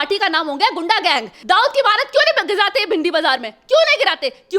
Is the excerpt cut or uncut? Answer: cut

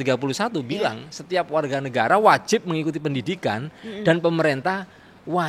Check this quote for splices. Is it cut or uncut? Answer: uncut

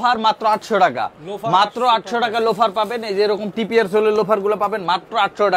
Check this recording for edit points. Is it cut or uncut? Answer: uncut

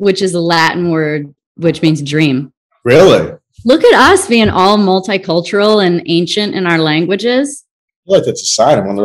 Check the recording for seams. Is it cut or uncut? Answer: uncut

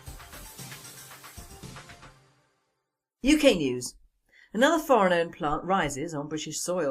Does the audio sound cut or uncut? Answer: cut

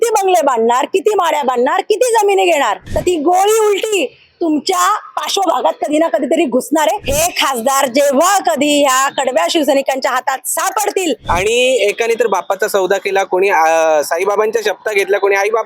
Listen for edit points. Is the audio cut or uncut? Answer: cut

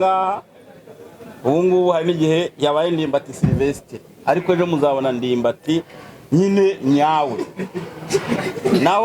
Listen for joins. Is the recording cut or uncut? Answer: uncut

